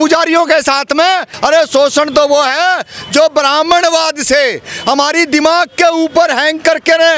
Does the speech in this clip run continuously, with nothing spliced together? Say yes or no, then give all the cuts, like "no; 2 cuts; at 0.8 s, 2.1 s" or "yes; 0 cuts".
no; 1 cut; at 1.3 s